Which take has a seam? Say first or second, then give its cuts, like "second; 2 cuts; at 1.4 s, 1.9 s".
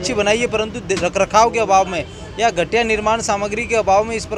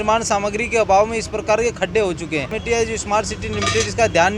second; 1 cut; at 2.6 s